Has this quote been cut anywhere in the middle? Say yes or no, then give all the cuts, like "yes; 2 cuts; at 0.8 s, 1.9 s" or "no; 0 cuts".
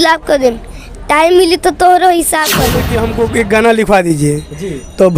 yes; 1 cut; at 2.9 s